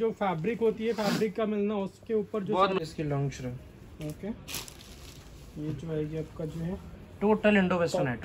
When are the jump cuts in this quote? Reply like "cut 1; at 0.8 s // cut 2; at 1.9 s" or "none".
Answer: cut 1; at 2.8 s